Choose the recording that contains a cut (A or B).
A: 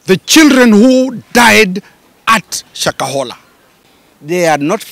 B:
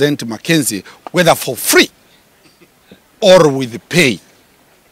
A